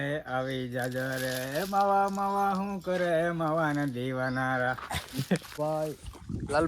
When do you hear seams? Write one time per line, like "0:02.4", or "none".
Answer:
0:05.5